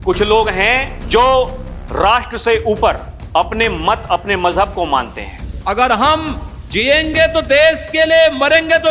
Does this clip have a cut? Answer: yes; 2 cuts; at 0.9 s, 5.6 s

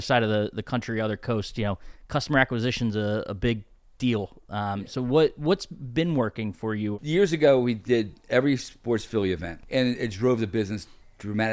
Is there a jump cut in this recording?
yes; 2 cuts; at 7.0 s, 9.5 s

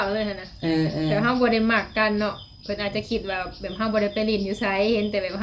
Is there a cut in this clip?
no; 0 cuts

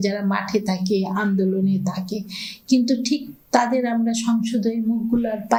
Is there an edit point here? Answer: no; 0 cuts

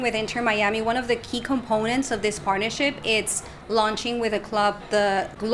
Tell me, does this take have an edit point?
no; 0 cuts

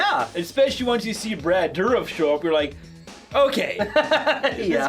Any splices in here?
no; 0 cuts

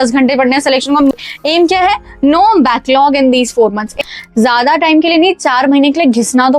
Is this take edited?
yes; 2 cuts; at 1.2 s, 3.9 s

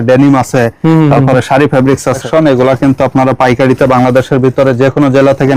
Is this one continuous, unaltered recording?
no; 1 cut; at 2.2 s

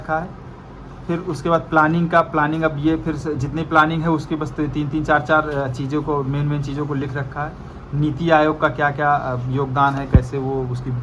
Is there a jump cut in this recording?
no; 0 cuts

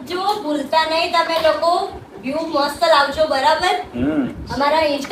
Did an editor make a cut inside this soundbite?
no; 0 cuts

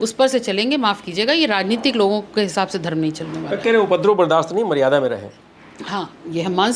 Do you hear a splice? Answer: no; 0 cuts

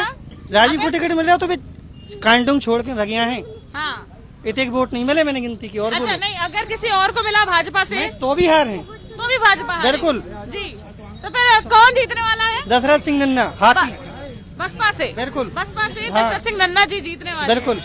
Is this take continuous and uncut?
yes; 0 cuts

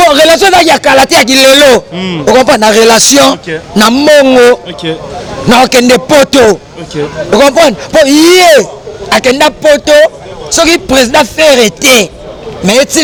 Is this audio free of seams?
yes; 0 cuts

